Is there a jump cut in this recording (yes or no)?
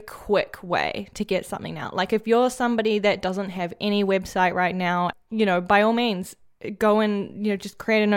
yes